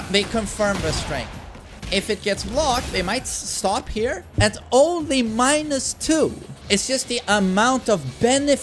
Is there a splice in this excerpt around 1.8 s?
yes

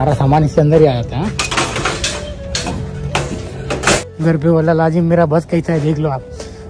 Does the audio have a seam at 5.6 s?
no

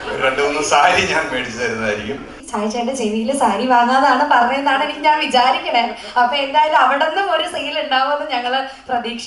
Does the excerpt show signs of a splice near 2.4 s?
yes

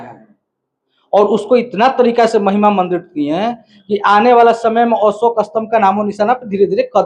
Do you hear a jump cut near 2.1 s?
no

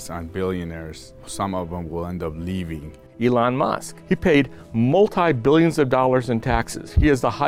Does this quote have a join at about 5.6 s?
no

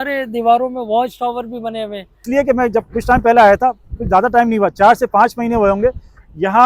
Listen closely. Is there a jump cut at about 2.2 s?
yes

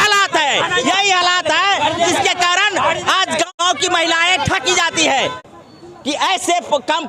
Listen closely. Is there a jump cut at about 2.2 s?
no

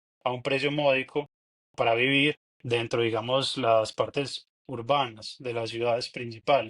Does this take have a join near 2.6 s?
no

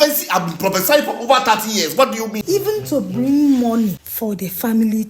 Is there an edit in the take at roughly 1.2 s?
no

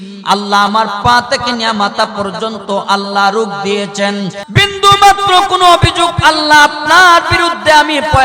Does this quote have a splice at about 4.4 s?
yes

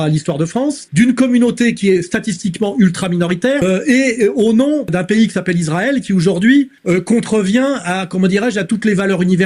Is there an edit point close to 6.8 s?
yes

